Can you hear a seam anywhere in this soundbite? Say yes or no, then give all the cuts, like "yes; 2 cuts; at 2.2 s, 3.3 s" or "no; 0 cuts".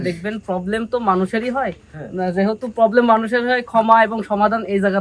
no; 0 cuts